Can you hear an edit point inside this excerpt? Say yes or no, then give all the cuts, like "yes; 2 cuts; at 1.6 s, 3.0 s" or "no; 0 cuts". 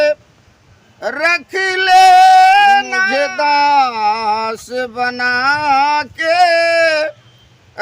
yes; 1 cut; at 3.0 s